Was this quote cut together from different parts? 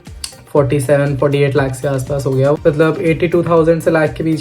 yes; 1 cut; at 2.6 s

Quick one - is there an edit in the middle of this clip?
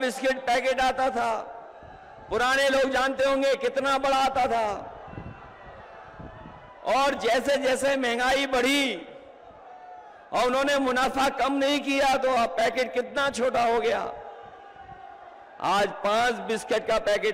no; 0 cuts

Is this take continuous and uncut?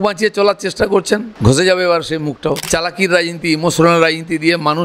no; 2 cuts; at 1.3 s, 2.6 s

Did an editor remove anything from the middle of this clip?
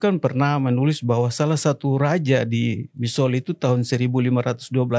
no; 0 cuts

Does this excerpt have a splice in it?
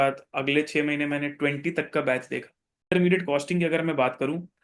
yes; 1 cut; at 2.9 s

